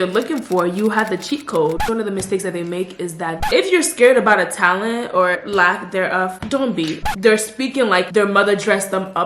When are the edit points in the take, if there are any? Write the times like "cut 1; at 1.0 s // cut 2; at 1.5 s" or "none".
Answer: cut 1; at 1.8 s // cut 2; at 3.4 s // cut 3; at 5.4 s // cut 4; at 7.0 s